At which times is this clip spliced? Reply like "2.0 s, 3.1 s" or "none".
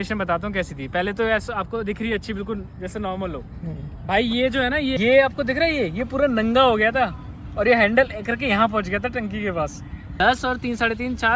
10.0 s